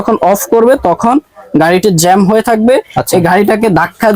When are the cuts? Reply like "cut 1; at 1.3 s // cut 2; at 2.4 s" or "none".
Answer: none